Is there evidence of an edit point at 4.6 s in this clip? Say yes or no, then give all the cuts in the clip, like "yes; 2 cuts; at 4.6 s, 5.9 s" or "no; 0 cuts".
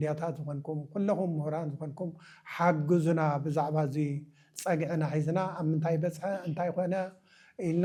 no; 0 cuts